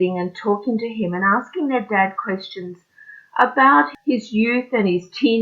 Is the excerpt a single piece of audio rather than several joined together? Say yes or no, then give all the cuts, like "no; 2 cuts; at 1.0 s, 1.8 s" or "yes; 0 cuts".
no; 1 cut; at 3.9 s